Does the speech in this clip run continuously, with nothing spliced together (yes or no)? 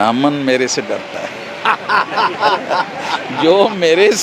yes